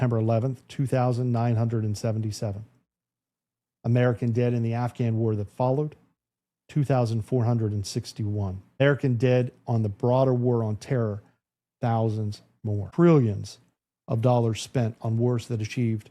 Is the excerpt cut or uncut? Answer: cut